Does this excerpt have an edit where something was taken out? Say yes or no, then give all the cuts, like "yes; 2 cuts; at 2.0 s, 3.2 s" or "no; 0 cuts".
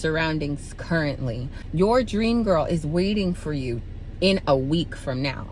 yes; 1 cut; at 1.5 s